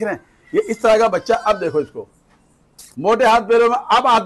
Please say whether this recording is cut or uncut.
uncut